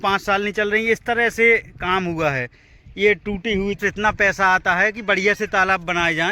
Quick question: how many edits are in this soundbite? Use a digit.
1